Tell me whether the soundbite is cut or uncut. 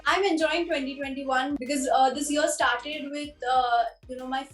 cut